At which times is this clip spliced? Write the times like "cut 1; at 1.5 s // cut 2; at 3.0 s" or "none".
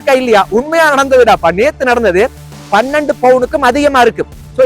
cut 1; at 2.5 s